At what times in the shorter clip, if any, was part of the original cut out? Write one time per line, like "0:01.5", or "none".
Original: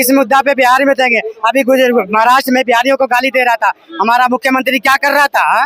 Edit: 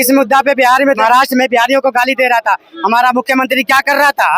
0:01.0